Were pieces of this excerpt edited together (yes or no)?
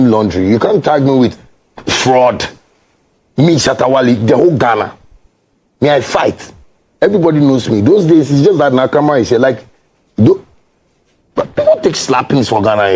no